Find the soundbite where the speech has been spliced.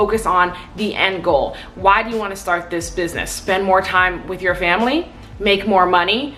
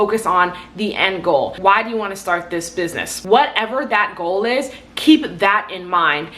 second; 2 cuts; at 1.5 s, 3.1 s

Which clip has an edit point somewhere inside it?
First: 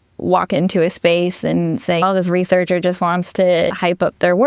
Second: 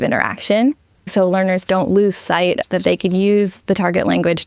second; 2 cuts; at 1.1 s, 2.6 s

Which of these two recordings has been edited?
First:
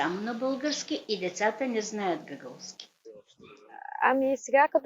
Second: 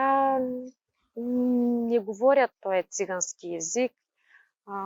first; 1 cut; at 3.2 s

